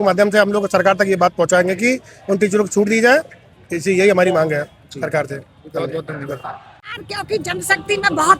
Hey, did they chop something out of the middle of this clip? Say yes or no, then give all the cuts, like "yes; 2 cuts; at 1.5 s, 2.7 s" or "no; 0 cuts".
no; 0 cuts